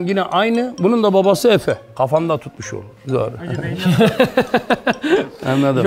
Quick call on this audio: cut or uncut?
uncut